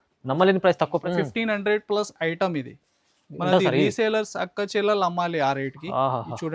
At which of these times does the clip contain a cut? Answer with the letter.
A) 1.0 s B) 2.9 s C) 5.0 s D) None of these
A